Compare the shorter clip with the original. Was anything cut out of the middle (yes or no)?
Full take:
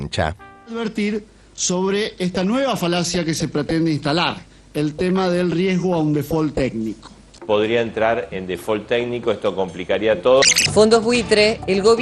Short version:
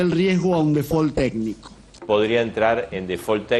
no